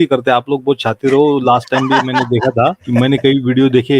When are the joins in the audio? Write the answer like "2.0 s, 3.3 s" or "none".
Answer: 2.8 s